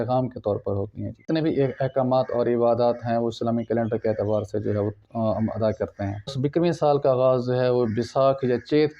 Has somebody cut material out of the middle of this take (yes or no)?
yes